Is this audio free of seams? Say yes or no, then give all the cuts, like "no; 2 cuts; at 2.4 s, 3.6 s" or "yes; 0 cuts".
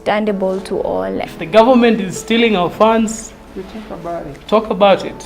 no; 1 cut; at 1.3 s